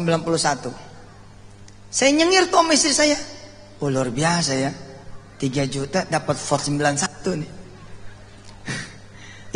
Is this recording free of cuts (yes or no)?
yes